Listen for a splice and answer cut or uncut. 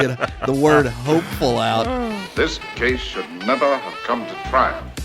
cut